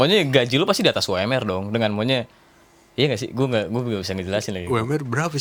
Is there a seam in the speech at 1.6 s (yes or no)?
no